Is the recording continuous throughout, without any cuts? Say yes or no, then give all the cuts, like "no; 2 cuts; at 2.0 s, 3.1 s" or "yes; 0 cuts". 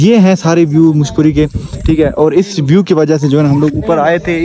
yes; 0 cuts